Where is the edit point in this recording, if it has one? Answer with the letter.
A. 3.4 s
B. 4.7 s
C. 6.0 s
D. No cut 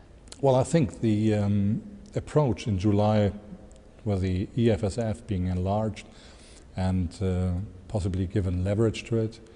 D